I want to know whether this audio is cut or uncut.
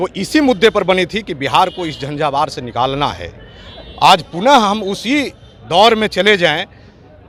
uncut